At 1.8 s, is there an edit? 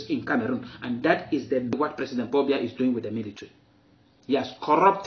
yes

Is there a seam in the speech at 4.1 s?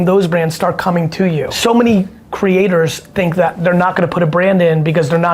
no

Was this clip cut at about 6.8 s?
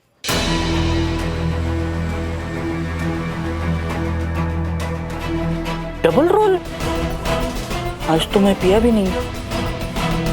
yes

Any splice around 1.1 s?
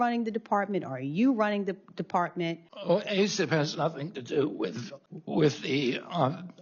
no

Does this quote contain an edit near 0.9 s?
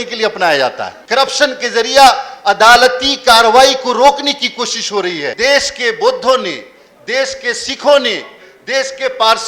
yes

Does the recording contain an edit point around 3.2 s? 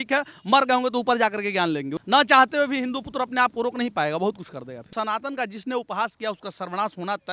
no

